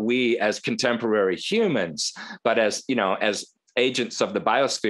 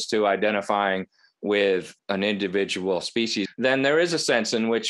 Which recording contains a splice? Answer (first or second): second